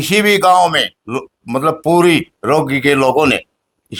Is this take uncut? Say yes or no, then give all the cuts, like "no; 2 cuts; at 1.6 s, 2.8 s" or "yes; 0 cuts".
yes; 0 cuts